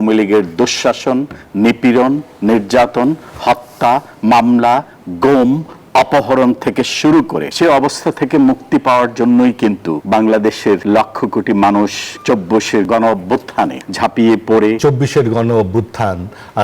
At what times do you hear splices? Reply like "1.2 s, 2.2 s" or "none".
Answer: 7.4 s, 9.9 s, 10.8 s, 12.6 s, 13.8 s, 14.8 s